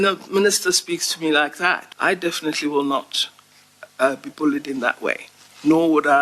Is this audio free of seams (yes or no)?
no